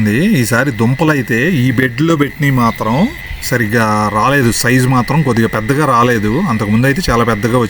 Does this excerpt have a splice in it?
no; 0 cuts

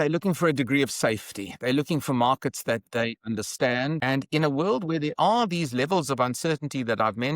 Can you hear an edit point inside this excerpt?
yes; 1 cut; at 4.0 s

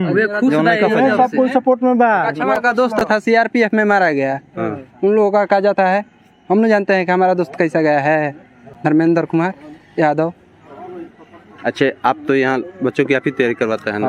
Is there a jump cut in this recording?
no; 0 cuts

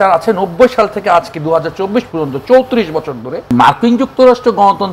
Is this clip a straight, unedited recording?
no; 1 cut; at 3.5 s

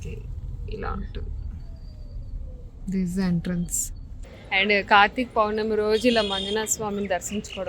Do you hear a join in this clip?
yes; 1 cut; at 4.3 s

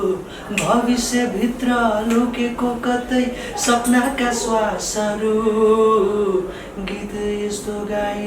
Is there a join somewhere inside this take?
no; 0 cuts

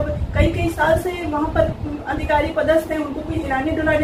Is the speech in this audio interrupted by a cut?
no; 0 cuts

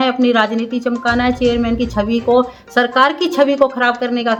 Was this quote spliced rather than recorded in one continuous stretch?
no; 0 cuts

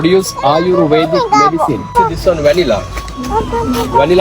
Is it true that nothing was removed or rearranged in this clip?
no; 1 cut; at 1.9 s

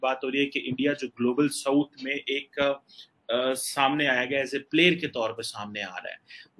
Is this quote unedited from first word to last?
yes; 0 cuts

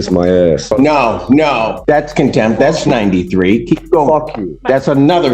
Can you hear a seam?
yes; 2 cuts; at 0.7 s, 1.8 s

